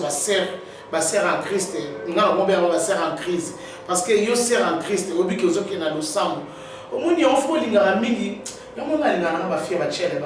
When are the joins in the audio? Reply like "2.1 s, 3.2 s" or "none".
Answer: none